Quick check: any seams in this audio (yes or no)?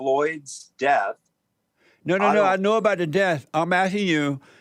no